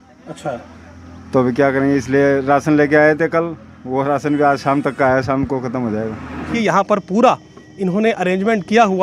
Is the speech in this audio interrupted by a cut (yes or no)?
yes